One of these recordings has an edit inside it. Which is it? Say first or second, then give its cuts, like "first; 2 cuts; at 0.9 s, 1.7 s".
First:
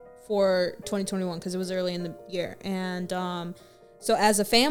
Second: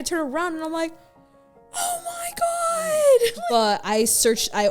second; 1 cut; at 3.4 s